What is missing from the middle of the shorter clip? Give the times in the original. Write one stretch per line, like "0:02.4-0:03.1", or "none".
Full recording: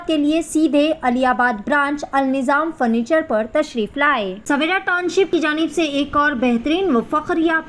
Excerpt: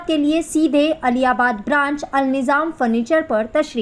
none